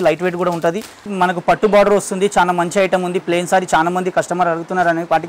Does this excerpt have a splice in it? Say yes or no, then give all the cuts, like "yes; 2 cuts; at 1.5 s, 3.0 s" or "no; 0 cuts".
yes; 1 cut; at 1.0 s